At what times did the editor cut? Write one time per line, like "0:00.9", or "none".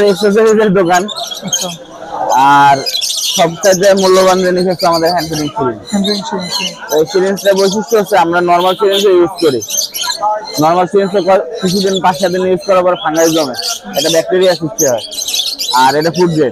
none